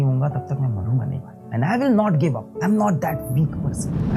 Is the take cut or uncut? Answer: cut